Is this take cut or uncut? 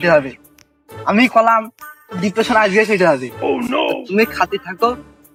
uncut